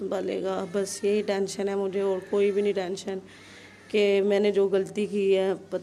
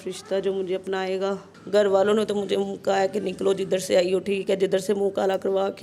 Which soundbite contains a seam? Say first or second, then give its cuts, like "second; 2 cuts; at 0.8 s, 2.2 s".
second; 1 cut; at 1.5 s